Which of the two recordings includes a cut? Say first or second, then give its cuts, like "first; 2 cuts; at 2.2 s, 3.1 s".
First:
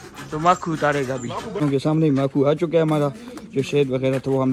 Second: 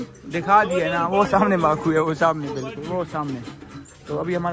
first; 1 cut; at 1.5 s